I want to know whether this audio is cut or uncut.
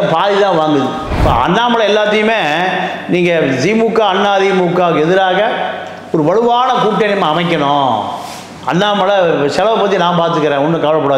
cut